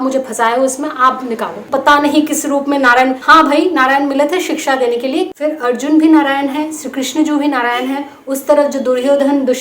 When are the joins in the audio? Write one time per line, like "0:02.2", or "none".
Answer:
0:01.6
0:03.2
0:05.3